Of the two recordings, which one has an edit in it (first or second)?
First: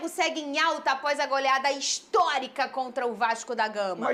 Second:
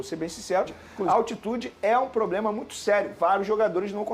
second